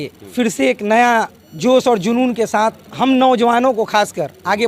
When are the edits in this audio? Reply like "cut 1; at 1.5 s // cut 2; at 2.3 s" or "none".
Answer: cut 1; at 1.4 s